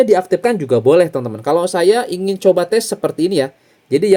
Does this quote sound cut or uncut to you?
uncut